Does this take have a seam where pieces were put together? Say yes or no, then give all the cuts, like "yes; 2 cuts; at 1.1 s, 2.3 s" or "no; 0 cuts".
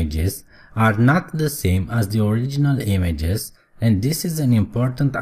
no; 0 cuts